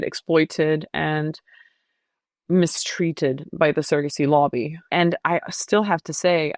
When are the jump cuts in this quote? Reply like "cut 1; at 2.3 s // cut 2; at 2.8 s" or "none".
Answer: cut 1; at 4.8 s